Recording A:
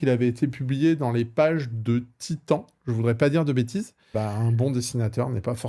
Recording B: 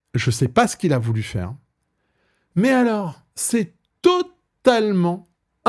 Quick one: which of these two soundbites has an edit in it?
A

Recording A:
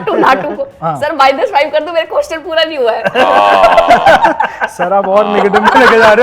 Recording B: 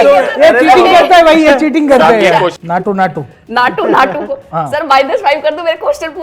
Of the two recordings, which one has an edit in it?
B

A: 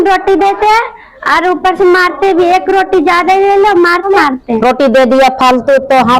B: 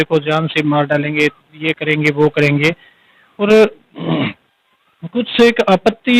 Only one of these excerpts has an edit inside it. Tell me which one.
A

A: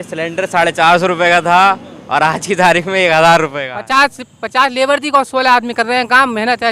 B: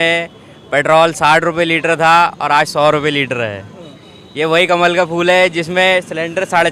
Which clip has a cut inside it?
A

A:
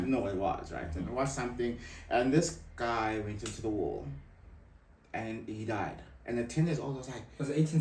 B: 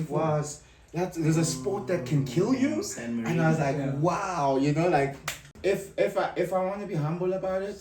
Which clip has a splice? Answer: B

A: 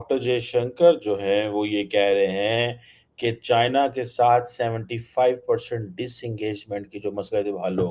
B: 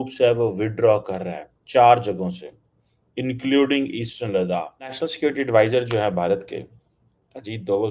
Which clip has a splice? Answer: B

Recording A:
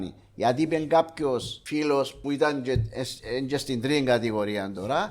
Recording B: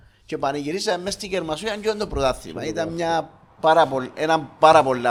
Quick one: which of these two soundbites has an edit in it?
A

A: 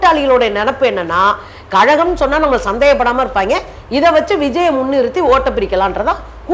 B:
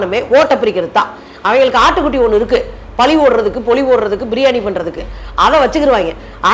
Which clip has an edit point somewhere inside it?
B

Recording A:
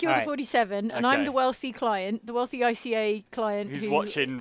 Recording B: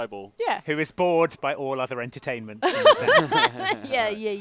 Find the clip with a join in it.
B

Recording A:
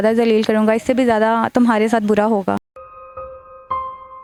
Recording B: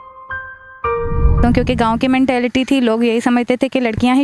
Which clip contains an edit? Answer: B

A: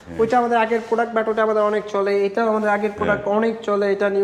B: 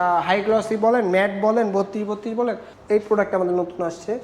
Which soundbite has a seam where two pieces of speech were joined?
B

